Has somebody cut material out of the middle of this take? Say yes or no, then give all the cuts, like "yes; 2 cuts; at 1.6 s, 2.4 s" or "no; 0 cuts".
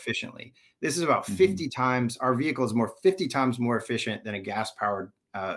no; 0 cuts